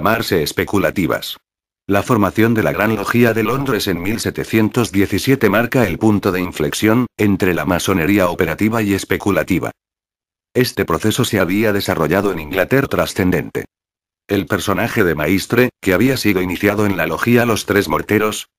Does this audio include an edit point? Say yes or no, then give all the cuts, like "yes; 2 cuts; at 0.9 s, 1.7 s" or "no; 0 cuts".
no; 0 cuts